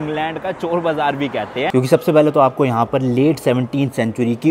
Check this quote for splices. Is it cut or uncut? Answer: cut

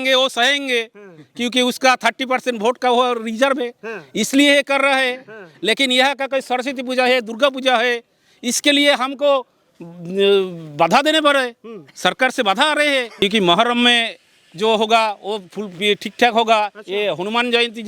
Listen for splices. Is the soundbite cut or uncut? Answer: cut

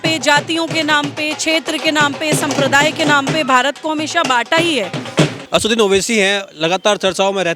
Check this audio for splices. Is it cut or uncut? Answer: cut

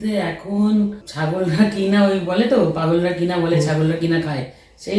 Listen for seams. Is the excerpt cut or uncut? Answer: cut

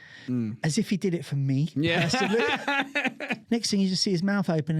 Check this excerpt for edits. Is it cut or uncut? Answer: cut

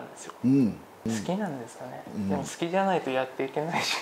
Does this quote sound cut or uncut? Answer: cut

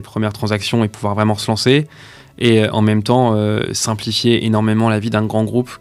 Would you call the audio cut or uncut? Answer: uncut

